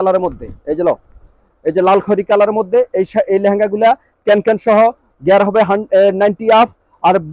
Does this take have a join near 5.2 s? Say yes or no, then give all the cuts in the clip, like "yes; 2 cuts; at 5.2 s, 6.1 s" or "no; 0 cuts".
no; 0 cuts